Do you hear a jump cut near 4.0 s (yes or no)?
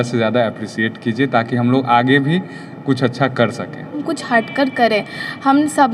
yes